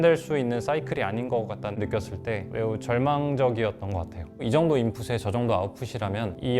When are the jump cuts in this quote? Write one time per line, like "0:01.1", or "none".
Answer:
0:01.8
0:04.2